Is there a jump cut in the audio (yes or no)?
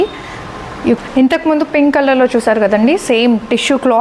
yes